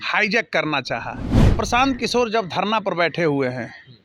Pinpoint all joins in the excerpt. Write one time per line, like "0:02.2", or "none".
0:01.4